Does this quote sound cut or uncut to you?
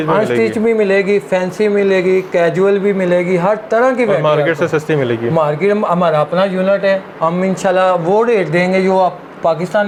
uncut